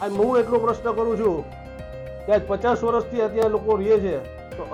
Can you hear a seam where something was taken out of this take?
no; 0 cuts

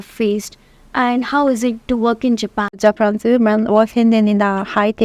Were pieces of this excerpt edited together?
yes; 1 cut; at 2.8 s

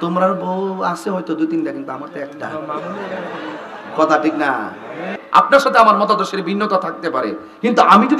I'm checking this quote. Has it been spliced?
yes; 1 cut; at 5.2 s

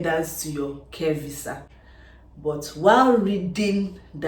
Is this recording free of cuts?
yes; 0 cuts

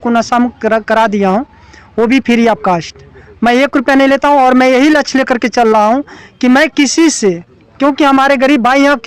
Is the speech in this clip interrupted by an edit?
no; 0 cuts

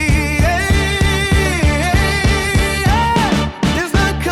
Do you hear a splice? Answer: no; 0 cuts

